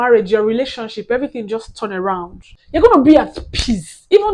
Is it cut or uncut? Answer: uncut